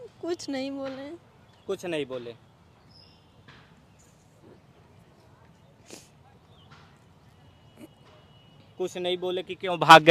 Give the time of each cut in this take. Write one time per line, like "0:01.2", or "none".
none

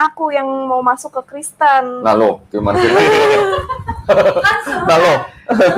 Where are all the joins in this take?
none

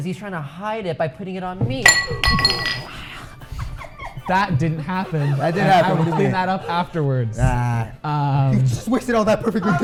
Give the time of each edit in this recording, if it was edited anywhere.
none

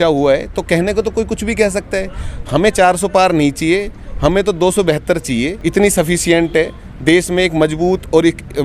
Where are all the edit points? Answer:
0:05.5

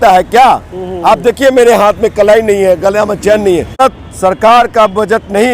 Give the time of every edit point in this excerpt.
0:03.8

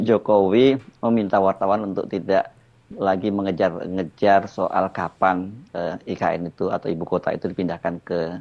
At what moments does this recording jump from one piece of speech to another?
none

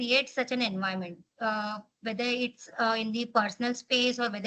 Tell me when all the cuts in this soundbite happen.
none

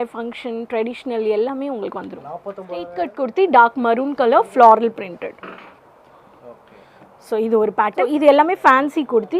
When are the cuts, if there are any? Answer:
0:03.0
0:08.1

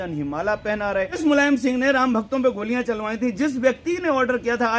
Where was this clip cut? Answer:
0:01.2

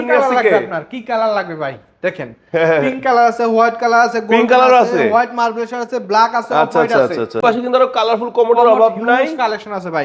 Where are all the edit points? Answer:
0:07.4

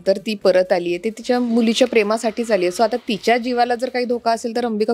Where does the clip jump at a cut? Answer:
none

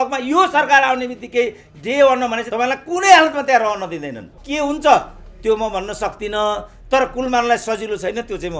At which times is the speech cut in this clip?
0:02.4
0:04.4

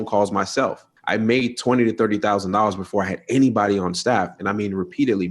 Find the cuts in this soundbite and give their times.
0:00.9

